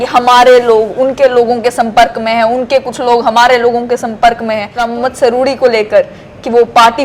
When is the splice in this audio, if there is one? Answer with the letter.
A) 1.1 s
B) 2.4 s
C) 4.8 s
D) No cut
C